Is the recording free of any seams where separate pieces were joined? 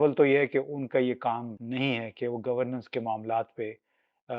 no; 1 cut; at 1.5 s

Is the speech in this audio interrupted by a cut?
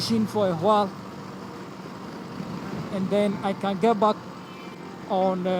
no; 0 cuts

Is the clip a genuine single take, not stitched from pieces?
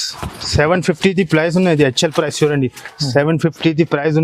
yes; 0 cuts

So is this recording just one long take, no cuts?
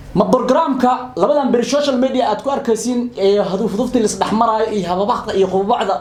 yes; 0 cuts

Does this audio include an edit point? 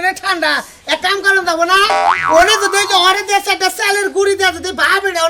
no; 0 cuts

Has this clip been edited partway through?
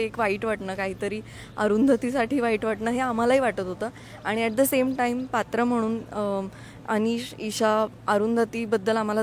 no; 0 cuts

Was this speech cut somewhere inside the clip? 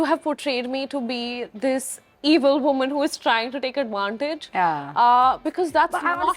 no; 0 cuts

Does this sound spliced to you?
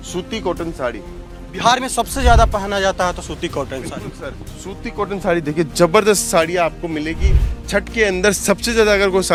no; 0 cuts

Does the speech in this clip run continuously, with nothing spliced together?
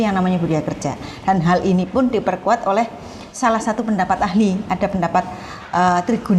yes; 0 cuts

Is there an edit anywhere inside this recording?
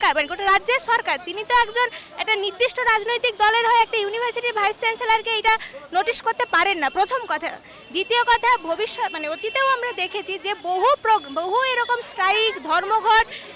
no; 0 cuts

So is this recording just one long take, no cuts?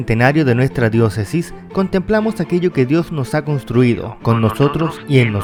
yes; 0 cuts

